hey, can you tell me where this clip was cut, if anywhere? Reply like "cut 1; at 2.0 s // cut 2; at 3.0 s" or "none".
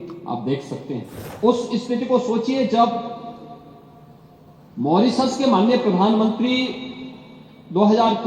cut 1; at 1.2 s